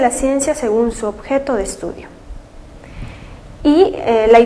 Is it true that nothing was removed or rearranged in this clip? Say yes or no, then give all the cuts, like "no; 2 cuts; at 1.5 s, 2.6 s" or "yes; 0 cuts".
no; 1 cut; at 1.7 s